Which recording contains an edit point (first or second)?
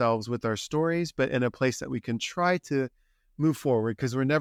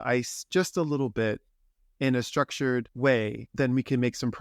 second